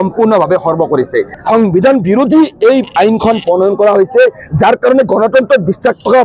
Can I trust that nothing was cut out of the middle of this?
no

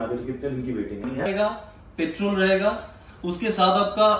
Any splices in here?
yes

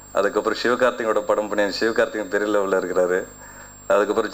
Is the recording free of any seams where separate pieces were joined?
yes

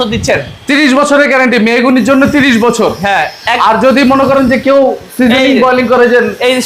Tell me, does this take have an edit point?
no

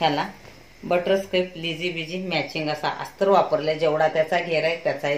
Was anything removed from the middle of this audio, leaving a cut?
no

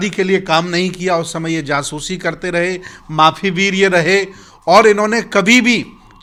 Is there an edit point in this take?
no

